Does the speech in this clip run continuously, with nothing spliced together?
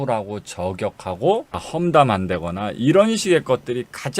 no; 1 cut; at 1.6 s

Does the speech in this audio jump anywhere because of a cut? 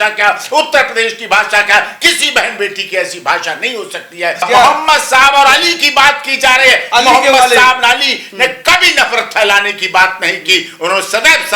yes; 1 cut; at 4.5 s

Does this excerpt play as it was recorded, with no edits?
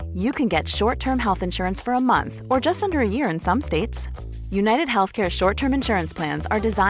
yes; 0 cuts

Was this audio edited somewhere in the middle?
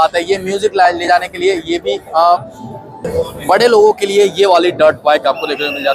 yes; 1 cut; at 2.0 s

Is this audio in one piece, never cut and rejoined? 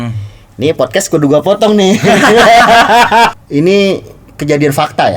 no; 1 cut; at 3.3 s

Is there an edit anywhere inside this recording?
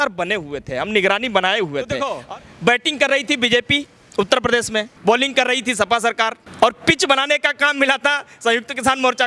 yes; 3 cuts; at 2.1 s, 4.9 s, 6.4 s

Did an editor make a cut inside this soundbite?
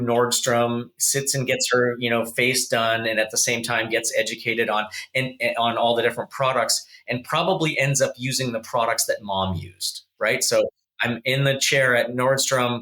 no; 0 cuts

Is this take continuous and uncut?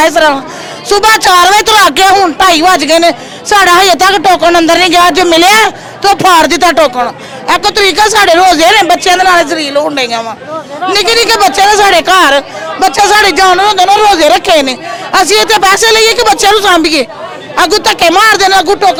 yes; 0 cuts

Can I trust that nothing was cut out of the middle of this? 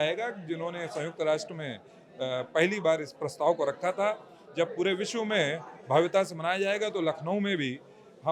yes; 0 cuts

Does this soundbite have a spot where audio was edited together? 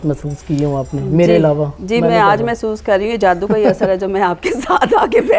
no; 0 cuts

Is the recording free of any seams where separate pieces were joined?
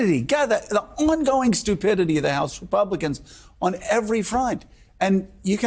yes; 0 cuts

